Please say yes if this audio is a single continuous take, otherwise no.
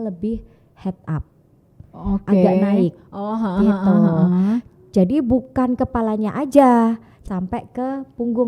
no